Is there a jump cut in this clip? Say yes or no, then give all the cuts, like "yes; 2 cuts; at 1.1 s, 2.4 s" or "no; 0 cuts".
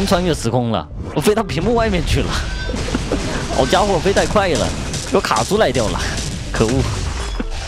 no; 0 cuts